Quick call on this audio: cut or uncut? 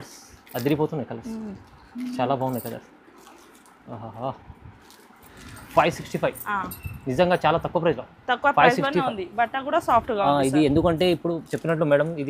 cut